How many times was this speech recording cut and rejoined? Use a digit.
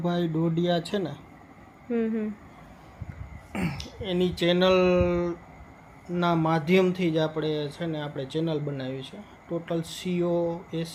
0